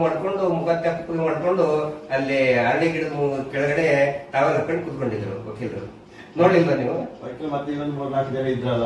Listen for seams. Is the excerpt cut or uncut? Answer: uncut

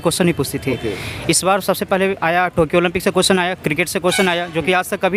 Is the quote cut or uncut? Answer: uncut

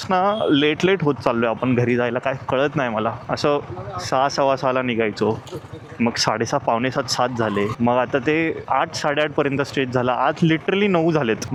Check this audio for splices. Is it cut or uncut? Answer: uncut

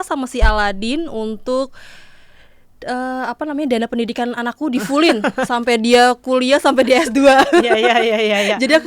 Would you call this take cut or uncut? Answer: uncut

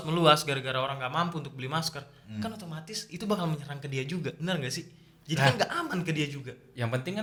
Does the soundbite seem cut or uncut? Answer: uncut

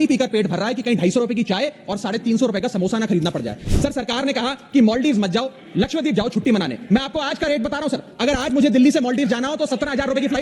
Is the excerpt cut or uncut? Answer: cut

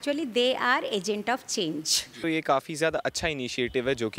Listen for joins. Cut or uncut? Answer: cut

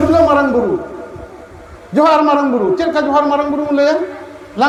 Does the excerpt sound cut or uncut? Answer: uncut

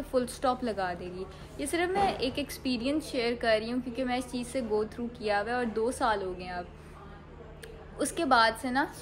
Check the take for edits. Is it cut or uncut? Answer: uncut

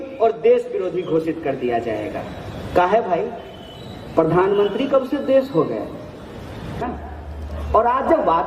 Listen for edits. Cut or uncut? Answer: cut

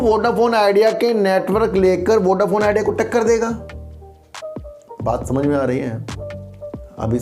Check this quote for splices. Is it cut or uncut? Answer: uncut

